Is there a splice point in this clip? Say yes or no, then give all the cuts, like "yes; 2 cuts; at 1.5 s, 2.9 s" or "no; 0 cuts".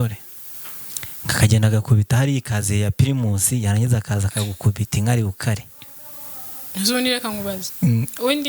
no; 0 cuts